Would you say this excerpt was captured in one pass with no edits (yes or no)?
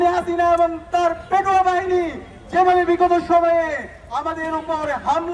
yes